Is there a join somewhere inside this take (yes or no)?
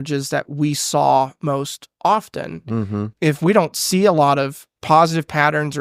yes